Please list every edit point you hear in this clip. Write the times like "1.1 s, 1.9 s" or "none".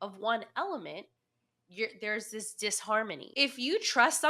3.2 s